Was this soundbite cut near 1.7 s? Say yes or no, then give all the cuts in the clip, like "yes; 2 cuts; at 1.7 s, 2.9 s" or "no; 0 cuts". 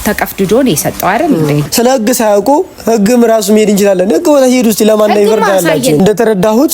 yes; 2 cuts; at 1.7 s, 6.0 s